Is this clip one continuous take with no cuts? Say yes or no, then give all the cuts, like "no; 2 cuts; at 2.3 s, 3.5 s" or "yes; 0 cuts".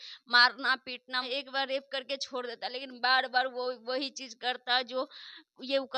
no; 1 cut; at 1.3 s